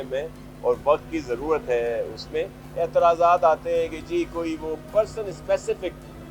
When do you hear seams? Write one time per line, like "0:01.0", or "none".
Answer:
0:02.6
0:04.9